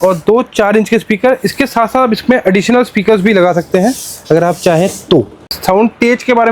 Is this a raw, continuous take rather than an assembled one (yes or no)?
no